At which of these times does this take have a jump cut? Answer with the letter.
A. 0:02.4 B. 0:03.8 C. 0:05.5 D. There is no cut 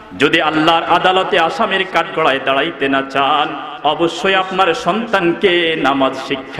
D